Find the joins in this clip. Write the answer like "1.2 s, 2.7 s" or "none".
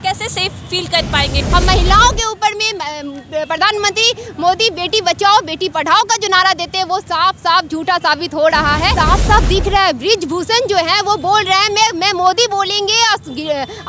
1.4 s, 8.9 s

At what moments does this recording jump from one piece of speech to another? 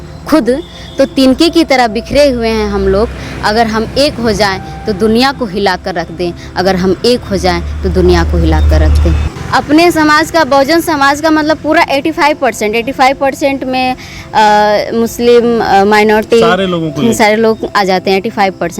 9.2 s

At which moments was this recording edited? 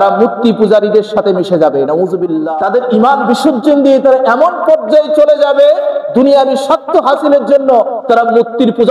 2.4 s

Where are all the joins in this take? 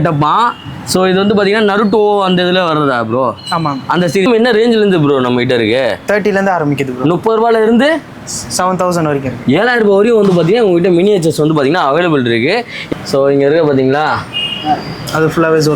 4.3 s, 12.8 s

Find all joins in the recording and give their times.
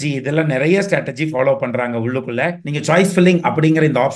2.6 s

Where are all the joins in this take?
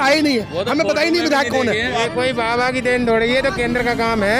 1.9 s

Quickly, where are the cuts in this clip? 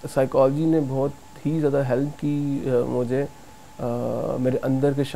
none

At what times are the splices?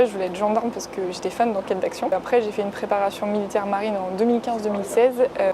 none

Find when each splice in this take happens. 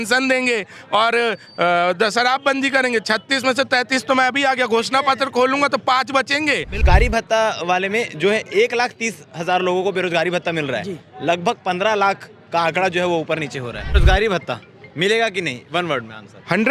6.8 s, 14.0 s

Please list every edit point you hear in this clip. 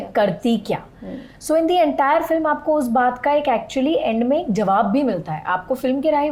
none

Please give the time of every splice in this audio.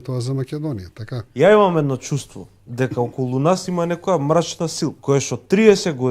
1.2 s, 5.0 s

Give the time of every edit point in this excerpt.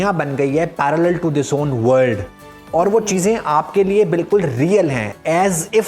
none

